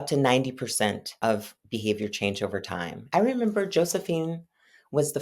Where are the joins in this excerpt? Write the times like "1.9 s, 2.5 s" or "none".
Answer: 1.2 s, 2.9 s